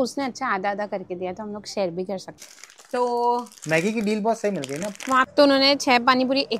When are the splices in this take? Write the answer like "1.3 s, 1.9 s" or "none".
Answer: 2.4 s, 5.3 s

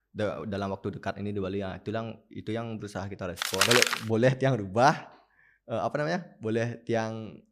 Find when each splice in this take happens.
3.6 s

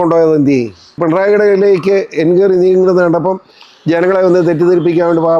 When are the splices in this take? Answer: 1.0 s

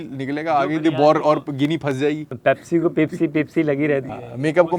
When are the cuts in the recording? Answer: 2.3 s

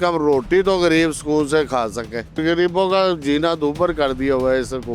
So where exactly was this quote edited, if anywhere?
2.4 s

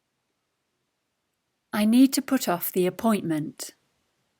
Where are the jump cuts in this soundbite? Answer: 1.5 s

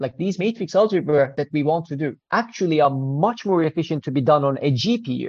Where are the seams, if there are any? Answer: none

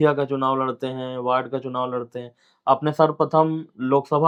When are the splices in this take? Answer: none

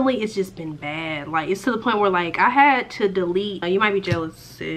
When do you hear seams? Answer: 3.6 s

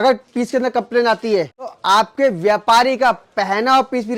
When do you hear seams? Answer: 1.8 s

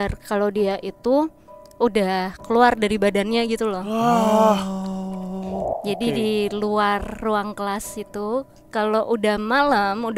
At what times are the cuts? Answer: 5.6 s

